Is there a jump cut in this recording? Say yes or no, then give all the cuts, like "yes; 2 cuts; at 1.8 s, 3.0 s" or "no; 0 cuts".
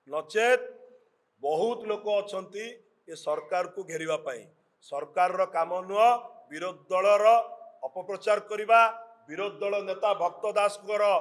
no; 0 cuts